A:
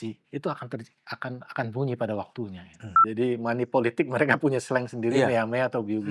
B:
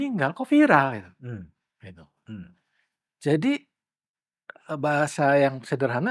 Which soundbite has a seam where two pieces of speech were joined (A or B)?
A